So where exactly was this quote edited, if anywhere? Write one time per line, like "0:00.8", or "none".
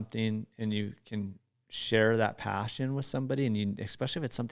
none

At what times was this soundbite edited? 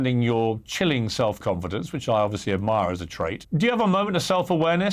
0:03.4

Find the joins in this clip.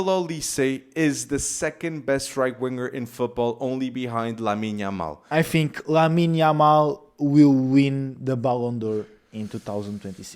0:05.2

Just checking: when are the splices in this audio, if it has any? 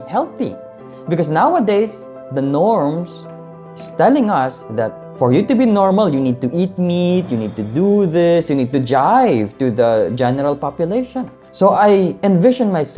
0:05.0
0:11.4

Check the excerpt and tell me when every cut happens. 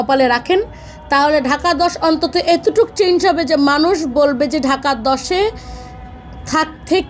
none

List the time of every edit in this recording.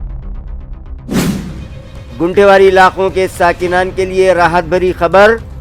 none

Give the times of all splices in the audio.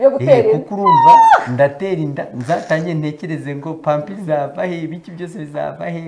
none

